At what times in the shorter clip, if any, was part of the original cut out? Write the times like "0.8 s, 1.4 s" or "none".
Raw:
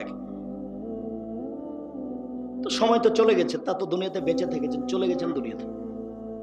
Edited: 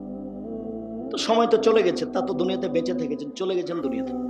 1.3 s